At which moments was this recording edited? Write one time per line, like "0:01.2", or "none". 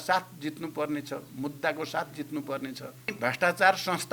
0:03.1